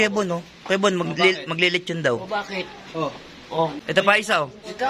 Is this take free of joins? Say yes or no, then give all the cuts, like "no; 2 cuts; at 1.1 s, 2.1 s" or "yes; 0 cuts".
no; 1 cut; at 3.8 s